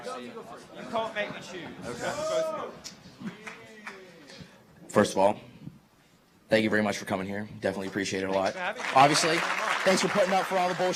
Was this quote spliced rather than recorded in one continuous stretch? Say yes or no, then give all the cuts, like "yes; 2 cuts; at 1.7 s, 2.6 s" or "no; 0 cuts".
no; 0 cuts